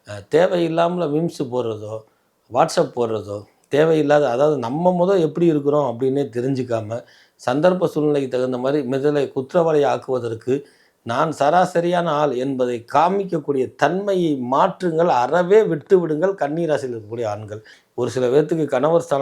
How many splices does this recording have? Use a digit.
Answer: 1